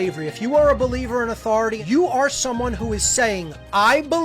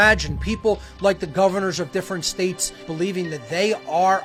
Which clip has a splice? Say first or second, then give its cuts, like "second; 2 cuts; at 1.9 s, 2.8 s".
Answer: first; 1 cut; at 1.8 s